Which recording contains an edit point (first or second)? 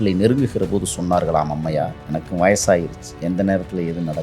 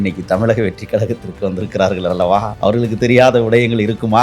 second